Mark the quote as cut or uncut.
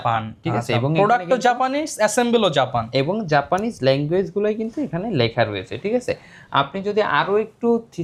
uncut